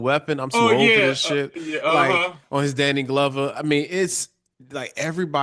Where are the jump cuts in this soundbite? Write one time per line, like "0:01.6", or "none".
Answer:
none